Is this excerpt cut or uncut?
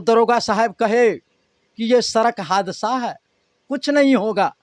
uncut